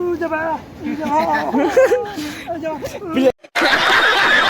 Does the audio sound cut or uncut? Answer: cut